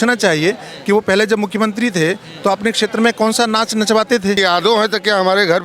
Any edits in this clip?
yes; 1 cut; at 4.4 s

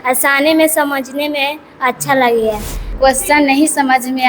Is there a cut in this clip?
yes; 1 cut; at 2.8 s

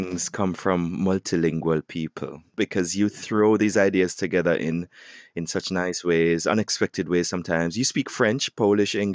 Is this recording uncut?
no; 1 cut; at 2.6 s

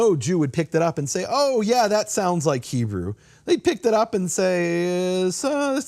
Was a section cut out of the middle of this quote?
no; 0 cuts

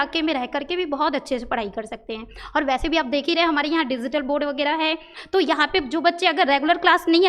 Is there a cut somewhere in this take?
no; 0 cuts

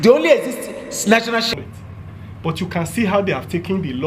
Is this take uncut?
no; 1 cut; at 1.5 s

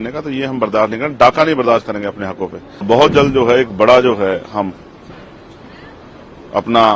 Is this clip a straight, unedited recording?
no; 1 cut; at 2.8 s

